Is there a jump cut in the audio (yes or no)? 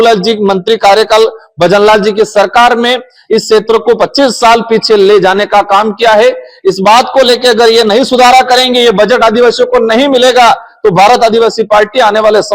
no